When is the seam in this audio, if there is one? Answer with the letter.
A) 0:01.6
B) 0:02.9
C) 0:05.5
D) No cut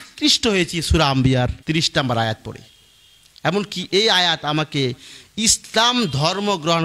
A